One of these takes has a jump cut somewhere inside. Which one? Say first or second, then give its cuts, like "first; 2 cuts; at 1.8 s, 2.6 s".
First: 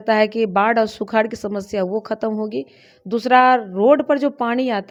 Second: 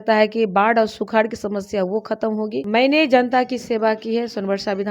second; 1 cut; at 2.6 s